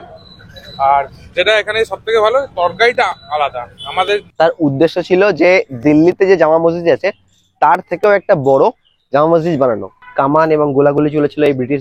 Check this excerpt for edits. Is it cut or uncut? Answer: cut